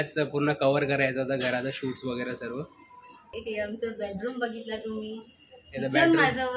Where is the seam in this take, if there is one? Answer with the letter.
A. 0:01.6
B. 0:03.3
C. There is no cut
B